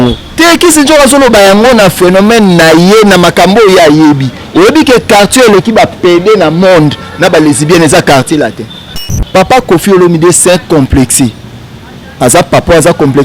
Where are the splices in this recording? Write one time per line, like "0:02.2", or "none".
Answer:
0:09.1